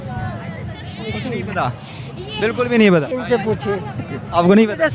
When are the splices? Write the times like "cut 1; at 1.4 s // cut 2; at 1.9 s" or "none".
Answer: cut 1; at 3.2 s